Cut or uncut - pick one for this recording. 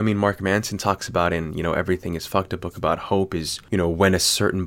cut